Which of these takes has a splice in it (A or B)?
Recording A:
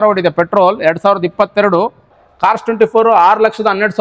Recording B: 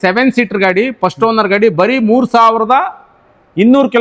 A